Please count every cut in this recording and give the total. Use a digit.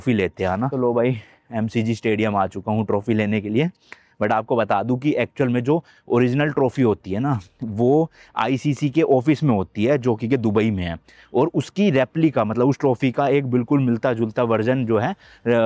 0